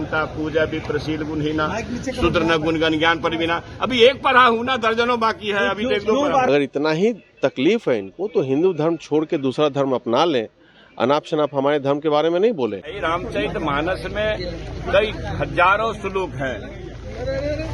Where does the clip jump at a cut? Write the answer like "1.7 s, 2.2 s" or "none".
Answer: 6.5 s, 13.0 s